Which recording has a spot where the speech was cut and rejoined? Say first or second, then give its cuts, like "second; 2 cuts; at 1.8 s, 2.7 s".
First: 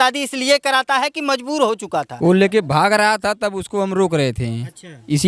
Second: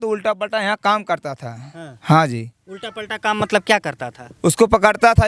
first; 1 cut; at 2.1 s